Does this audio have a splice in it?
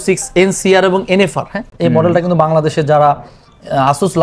no; 0 cuts

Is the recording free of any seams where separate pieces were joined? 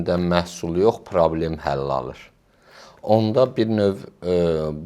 yes; 0 cuts

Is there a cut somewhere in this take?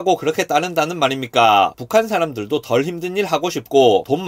yes; 1 cut; at 1.8 s

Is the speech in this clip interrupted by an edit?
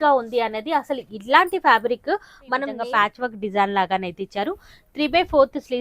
yes; 1 cut; at 2.7 s

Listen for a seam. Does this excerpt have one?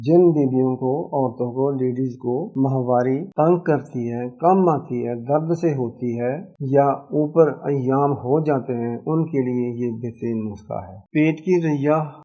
yes; 2 cuts; at 2.5 s, 3.3 s

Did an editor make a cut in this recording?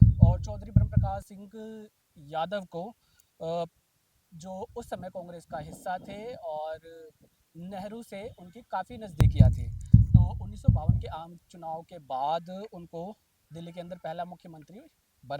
yes; 3 cuts; at 1.0 s, 9.1 s, 11.0 s

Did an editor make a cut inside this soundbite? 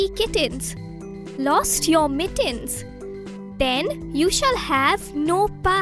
no; 0 cuts

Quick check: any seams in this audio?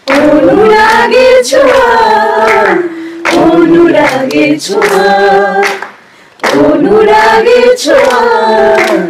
no; 0 cuts

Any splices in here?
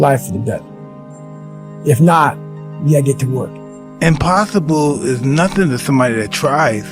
yes; 1 cut; at 3.8 s

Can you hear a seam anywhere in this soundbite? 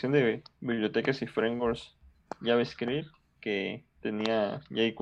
no; 0 cuts

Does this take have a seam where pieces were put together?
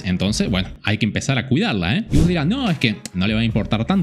yes; 1 cut; at 2.1 s

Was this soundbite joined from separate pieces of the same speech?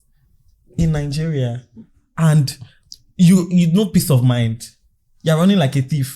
no; 0 cuts

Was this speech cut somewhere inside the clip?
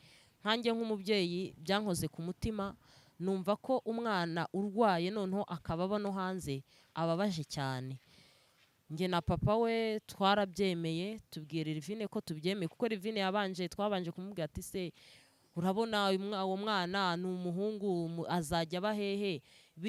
no; 0 cuts

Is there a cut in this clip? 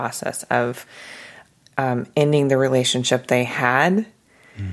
no; 0 cuts

